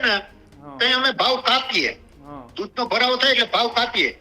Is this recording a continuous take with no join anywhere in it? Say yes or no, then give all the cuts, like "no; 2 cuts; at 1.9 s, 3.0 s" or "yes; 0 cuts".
yes; 0 cuts